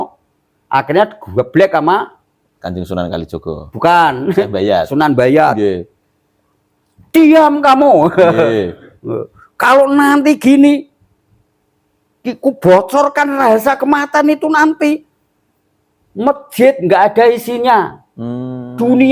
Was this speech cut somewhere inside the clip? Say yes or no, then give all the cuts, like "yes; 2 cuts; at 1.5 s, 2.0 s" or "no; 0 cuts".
no; 0 cuts